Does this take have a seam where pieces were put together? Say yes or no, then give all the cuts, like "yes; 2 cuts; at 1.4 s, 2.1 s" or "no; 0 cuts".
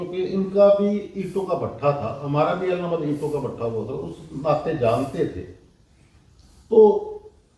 no; 0 cuts